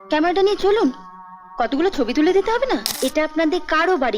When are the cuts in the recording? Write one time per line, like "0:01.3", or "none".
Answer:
0:02.9